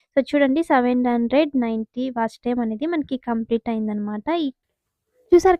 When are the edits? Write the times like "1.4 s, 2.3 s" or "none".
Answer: 4.6 s